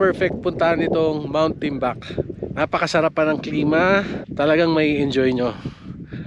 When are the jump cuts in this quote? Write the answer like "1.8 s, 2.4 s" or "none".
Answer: 2.4 s, 4.2 s